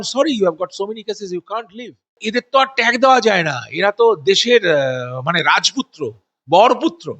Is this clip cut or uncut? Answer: cut